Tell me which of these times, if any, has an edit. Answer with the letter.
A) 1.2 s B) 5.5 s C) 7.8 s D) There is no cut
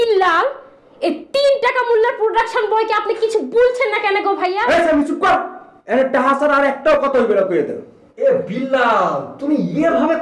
D